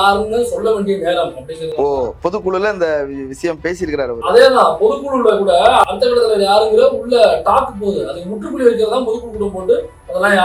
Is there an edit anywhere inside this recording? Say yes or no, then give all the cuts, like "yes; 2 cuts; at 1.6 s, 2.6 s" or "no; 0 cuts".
no; 0 cuts